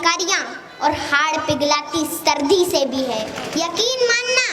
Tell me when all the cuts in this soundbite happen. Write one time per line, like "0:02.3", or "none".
0:03.4